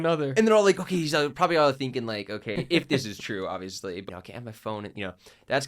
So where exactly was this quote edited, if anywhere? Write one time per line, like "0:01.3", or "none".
0:02.5
0:04.0